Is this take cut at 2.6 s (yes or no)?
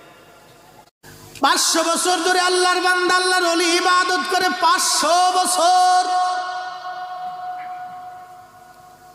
no